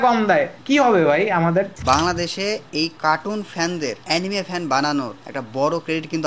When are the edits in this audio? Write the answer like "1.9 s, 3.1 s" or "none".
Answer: 1.7 s